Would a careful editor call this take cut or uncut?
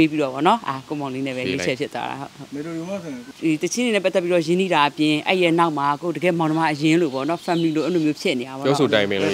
cut